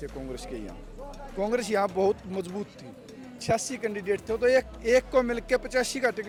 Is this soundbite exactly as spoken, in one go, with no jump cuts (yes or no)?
yes